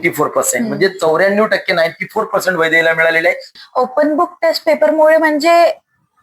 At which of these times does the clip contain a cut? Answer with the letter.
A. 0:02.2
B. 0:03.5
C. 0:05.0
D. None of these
B